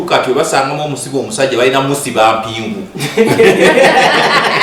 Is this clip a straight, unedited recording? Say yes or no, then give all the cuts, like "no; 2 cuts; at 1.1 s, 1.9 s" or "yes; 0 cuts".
yes; 0 cuts